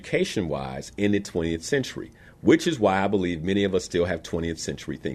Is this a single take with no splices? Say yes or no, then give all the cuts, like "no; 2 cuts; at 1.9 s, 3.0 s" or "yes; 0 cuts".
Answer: yes; 0 cuts